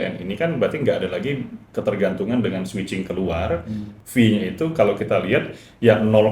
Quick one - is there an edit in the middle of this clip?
yes; 1 cut; at 3.8 s

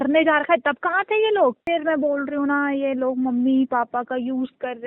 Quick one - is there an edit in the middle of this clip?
no; 0 cuts

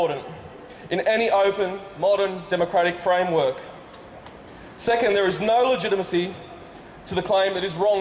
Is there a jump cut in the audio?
no; 0 cuts

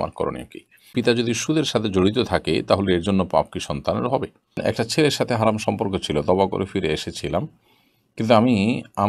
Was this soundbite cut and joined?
yes; 2 cuts; at 0.9 s, 4.6 s

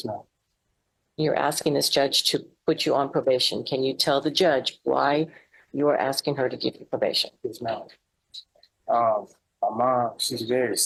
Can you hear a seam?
no; 0 cuts

